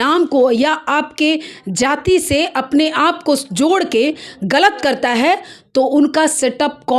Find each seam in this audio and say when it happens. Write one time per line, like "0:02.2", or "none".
none